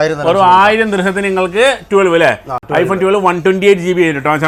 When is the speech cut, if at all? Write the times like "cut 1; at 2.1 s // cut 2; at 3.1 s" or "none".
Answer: none